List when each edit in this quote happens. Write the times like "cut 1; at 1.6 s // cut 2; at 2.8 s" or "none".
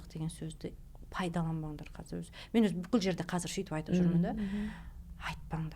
none